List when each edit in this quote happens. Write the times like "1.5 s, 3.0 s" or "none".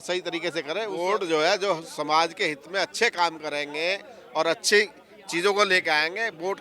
0.9 s

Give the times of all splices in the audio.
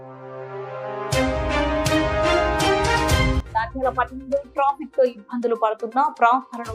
none

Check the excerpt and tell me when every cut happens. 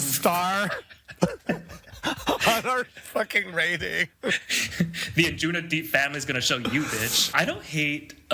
7.2 s

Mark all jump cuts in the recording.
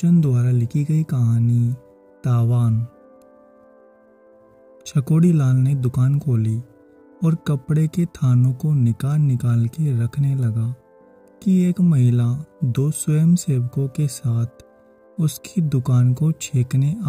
2.9 s, 4.4 s

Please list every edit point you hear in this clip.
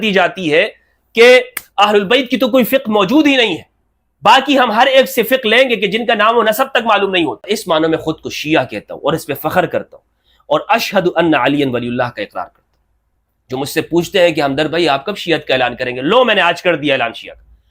7.5 s

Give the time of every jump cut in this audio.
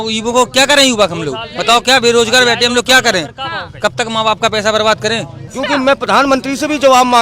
5.4 s

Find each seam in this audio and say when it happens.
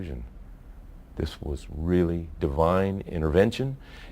3.1 s

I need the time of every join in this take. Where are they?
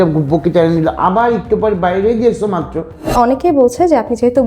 3.1 s

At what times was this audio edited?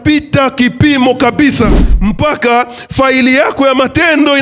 1.9 s

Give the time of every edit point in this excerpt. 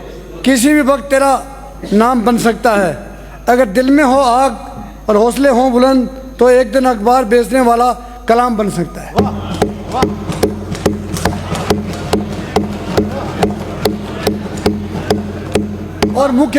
none

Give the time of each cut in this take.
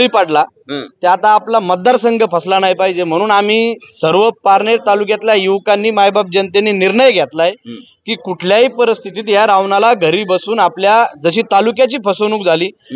none

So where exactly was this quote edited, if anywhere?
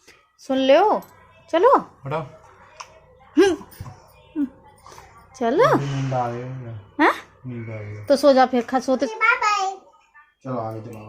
9.1 s

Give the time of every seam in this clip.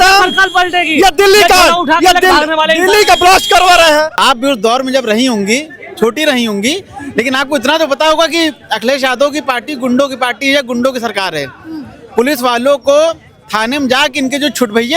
4.1 s

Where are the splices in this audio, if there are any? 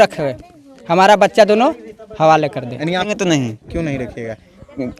3.1 s

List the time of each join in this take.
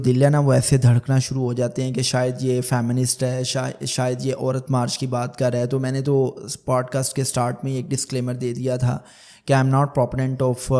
none

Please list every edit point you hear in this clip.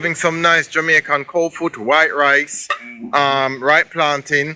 none

